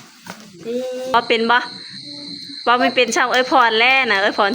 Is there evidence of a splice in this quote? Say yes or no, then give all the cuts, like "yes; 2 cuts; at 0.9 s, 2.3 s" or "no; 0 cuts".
yes; 1 cut; at 1.1 s